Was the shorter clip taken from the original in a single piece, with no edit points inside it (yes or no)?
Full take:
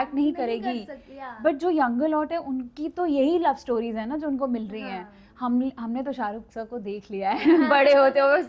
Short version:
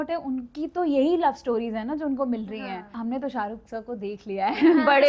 no